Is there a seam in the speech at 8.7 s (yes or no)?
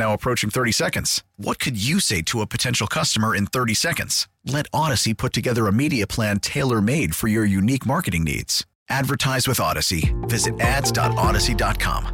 no